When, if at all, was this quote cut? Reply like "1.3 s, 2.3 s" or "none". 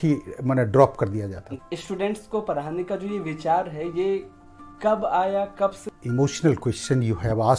1.5 s, 5.9 s